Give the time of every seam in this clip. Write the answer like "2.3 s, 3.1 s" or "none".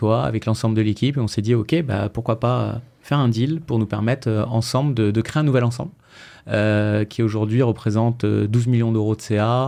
none

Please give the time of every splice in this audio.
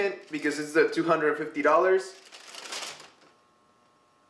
none

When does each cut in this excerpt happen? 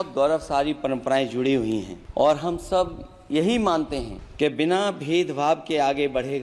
2.0 s, 4.2 s

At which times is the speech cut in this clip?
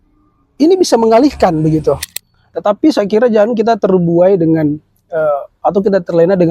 2.1 s

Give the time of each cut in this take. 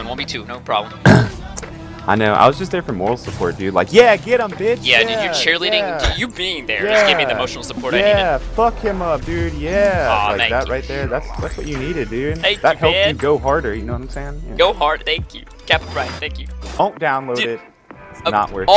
3.9 s

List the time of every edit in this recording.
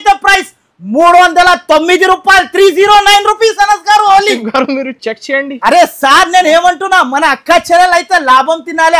none

